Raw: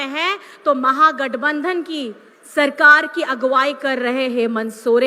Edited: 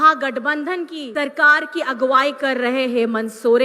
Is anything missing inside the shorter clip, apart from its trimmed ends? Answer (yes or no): yes